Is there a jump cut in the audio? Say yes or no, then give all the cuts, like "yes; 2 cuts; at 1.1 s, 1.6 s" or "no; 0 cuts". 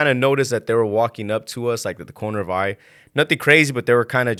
no; 0 cuts